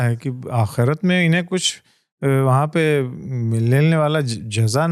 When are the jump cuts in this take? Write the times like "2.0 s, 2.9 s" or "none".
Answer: none